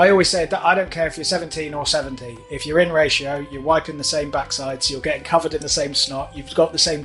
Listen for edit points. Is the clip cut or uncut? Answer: uncut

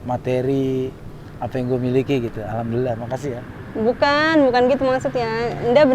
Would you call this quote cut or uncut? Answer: uncut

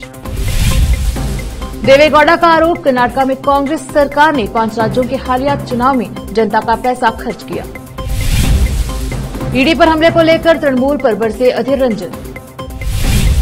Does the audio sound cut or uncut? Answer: uncut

